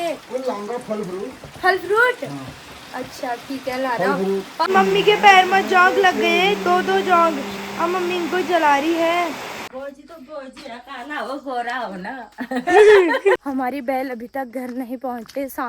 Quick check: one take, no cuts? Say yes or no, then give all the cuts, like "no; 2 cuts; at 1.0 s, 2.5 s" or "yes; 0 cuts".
no; 3 cuts; at 4.7 s, 9.6 s, 13.5 s